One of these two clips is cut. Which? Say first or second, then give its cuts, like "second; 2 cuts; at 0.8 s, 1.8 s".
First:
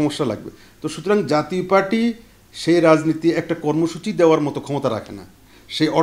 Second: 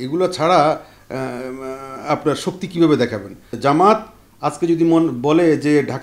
second; 1 cut; at 3.5 s